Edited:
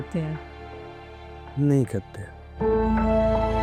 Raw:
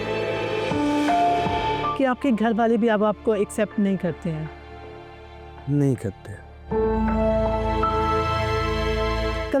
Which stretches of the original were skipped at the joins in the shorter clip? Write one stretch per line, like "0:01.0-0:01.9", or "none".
none